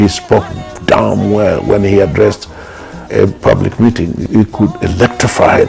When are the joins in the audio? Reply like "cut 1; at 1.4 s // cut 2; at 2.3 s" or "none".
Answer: none